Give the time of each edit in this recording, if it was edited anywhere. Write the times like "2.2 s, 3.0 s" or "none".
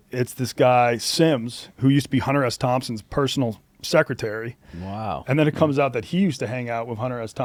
none

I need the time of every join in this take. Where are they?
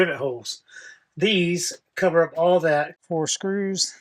2.9 s

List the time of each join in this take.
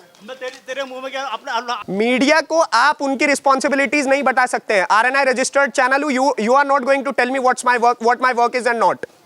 1.8 s

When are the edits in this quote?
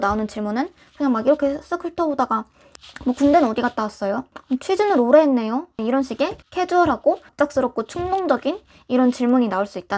none

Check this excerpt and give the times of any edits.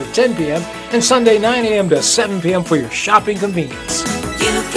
3.8 s

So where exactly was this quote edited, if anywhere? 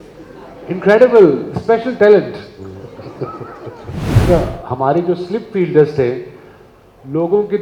4.2 s

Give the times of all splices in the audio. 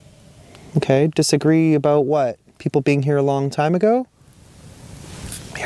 2.5 s, 4.5 s

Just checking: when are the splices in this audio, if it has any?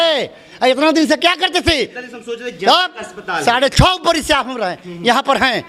none

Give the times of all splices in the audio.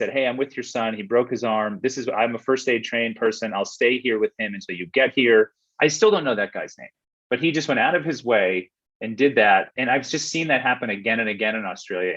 9.7 s

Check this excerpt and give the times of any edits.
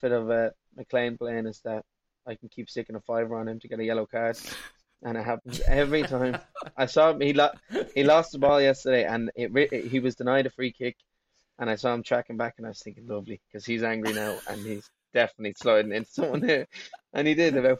none

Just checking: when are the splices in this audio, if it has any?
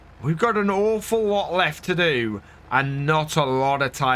none

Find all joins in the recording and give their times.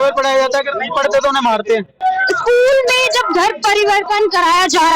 2.0 s

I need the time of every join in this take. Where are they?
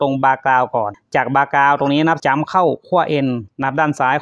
1.0 s, 2.2 s

